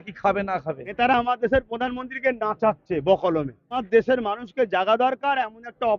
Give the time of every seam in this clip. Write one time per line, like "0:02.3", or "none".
0:00.9
0:03.8